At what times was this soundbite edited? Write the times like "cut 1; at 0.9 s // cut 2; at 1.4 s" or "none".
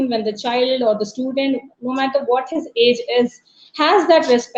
none